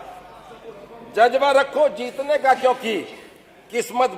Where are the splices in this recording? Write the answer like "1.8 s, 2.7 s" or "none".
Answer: none

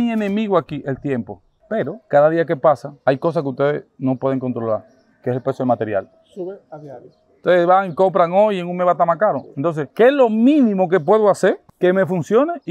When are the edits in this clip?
1.4 s, 11.7 s

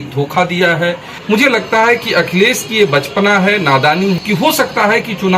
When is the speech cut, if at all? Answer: 1.1 s, 4.2 s

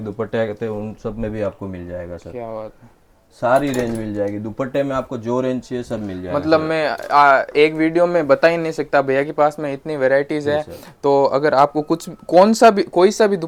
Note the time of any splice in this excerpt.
none

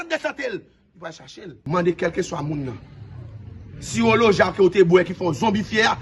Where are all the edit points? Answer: 1.5 s

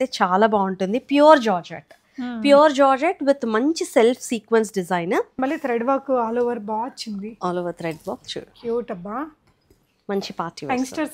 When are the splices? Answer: 5.4 s

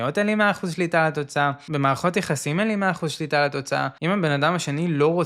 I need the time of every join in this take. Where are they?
1.6 s, 3.9 s

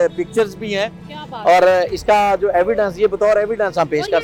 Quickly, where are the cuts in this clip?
none

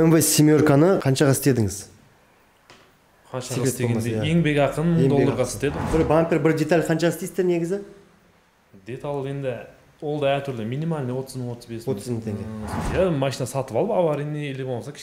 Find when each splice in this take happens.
1.0 s, 5.8 s, 12.7 s

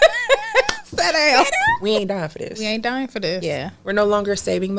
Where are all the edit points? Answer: 1.8 s, 3.4 s

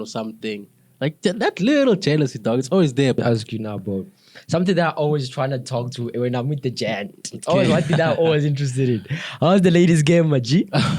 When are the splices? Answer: 3.2 s

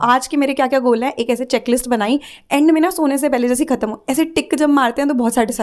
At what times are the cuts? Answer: none

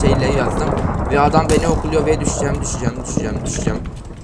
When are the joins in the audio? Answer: none

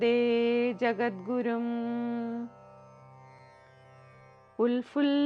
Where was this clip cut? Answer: 2.7 s, 4.5 s

